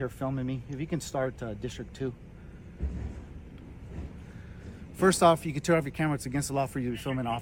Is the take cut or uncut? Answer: uncut